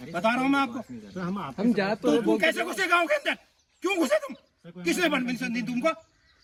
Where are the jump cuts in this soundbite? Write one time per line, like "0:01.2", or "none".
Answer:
none